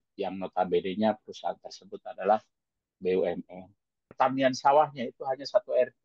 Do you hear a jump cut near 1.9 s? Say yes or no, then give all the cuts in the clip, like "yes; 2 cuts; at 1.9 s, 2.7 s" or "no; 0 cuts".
no; 1 cut; at 4.1 s